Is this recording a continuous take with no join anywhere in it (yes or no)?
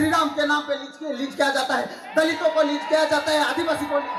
yes